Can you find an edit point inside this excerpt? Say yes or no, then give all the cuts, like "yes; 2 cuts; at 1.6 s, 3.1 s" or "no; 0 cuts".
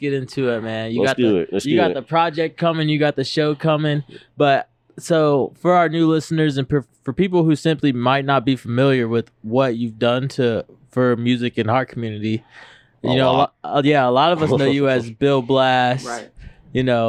no; 0 cuts